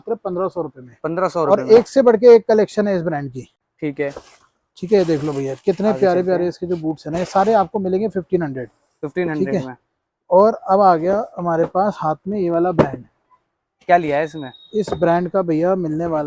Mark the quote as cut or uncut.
uncut